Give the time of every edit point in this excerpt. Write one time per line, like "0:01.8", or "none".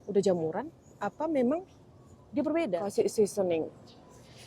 0:02.8

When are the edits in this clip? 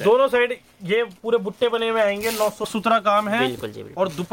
0:02.7

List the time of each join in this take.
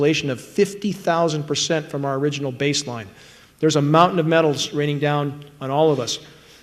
none

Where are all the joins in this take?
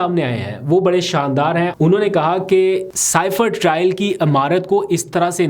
0:01.7
0:03.0

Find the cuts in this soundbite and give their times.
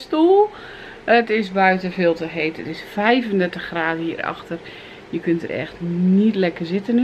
none

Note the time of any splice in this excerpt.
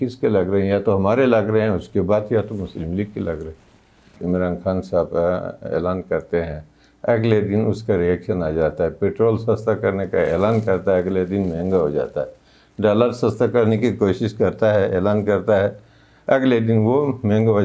0:04.2

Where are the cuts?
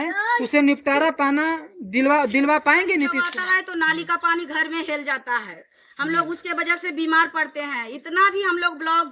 0:03.3

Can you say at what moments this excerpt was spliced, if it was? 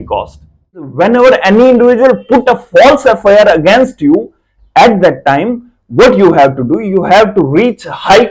0:00.9

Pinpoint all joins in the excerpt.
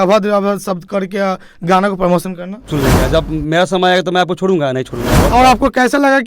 0:02.7
0:05.2

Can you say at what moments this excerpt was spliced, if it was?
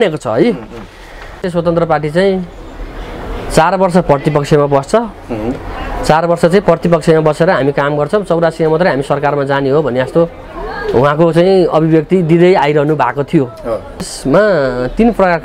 0:01.4
0:14.1

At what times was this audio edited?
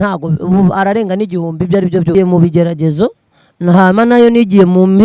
0:02.1

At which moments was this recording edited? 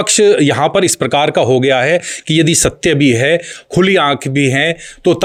none

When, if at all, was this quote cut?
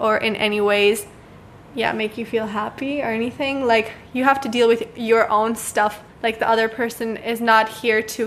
0:06.1

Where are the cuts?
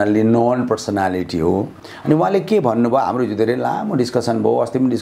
0:01.7

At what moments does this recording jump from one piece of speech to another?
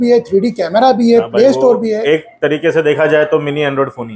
none

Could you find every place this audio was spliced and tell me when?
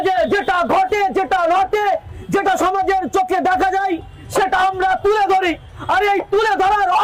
none

